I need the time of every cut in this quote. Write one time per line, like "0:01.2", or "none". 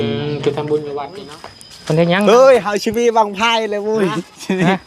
0:01.1